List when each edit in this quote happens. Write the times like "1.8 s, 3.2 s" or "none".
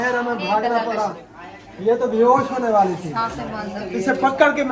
1.3 s